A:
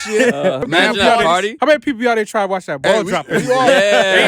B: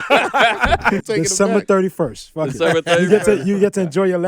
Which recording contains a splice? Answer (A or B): B